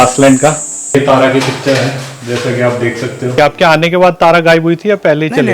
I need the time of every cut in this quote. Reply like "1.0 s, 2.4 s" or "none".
0.9 s, 3.3 s